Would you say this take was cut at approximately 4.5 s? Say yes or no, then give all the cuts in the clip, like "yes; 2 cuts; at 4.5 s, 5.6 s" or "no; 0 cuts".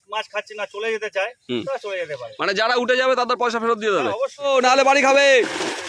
yes; 1 cut; at 4.5 s